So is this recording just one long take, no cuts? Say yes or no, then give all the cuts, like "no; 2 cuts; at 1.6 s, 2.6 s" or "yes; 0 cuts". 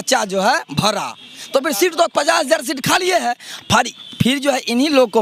yes; 0 cuts